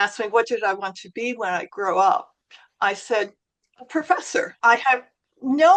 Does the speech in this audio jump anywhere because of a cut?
yes; 2 cuts; at 1.7 s, 4.5 s

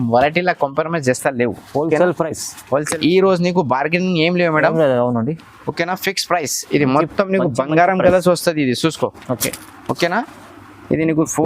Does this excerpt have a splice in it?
yes; 1 cut; at 2.9 s

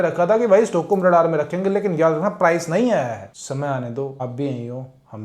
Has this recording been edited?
yes; 2 cuts; at 3.2 s, 4.2 s

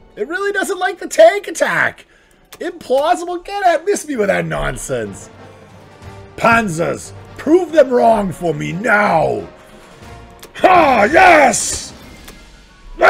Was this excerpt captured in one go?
yes; 0 cuts

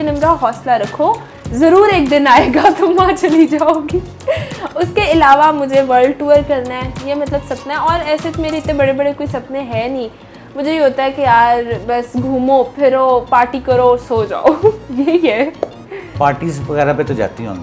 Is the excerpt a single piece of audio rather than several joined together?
yes; 0 cuts

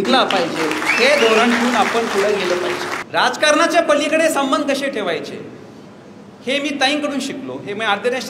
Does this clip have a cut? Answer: yes; 1 cut; at 2.9 s

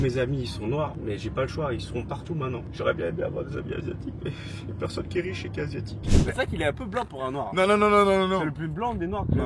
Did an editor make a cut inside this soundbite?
yes; 1 cut; at 6.0 s

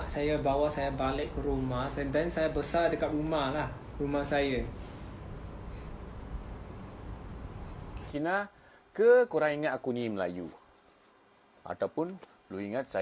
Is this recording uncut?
no; 1 cut; at 8.1 s

